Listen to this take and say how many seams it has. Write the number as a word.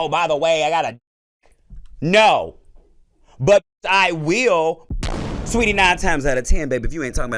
one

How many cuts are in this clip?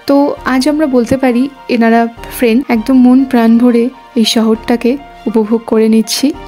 one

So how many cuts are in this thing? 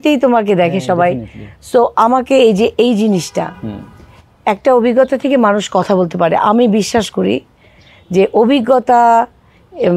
zero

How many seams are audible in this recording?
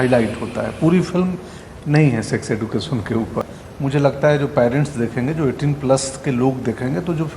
one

